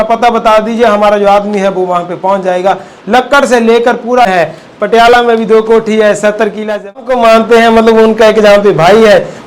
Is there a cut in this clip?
yes; 2 cuts; at 4.3 s, 7.0 s

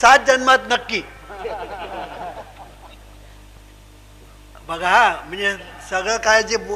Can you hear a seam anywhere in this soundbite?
no; 0 cuts

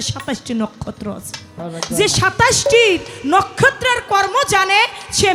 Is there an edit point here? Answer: yes; 1 cut; at 1.6 s

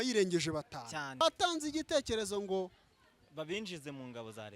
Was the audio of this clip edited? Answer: yes; 1 cut; at 1.2 s

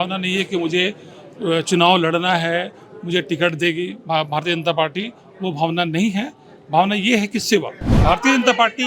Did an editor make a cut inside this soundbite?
yes; 1 cut; at 7.8 s

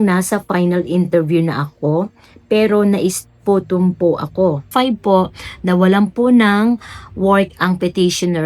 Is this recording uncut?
no; 1 cut; at 4.7 s

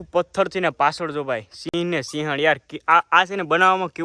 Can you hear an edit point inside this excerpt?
no; 0 cuts

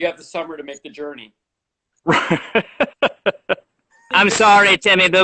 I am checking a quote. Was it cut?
yes; 1 cut; at 4.0 s

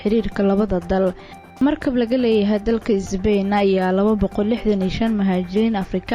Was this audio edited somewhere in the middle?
yes; 1 cut; at 1.4 s

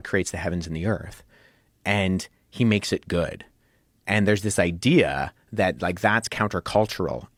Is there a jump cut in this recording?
no; 0 cuts

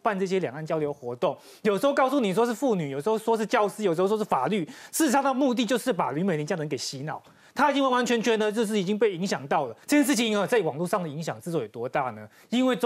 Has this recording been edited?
no; 0 cuts

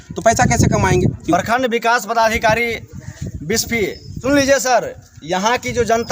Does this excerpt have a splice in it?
yes; 2 cuts; at 1.3 s, 4.1 s

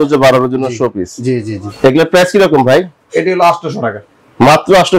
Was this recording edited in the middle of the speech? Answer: yes; 1 cut; at 1.6 s

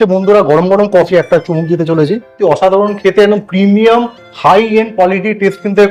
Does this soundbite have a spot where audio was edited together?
yes; 2 cuts; at 1.1 s, 2.3 s

